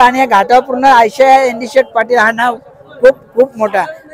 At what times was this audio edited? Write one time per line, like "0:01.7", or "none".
none